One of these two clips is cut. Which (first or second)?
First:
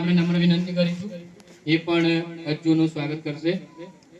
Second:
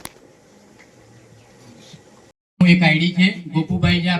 second